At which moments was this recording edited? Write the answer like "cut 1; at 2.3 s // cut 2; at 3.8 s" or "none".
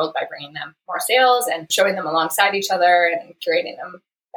cut 1; at 1.7 s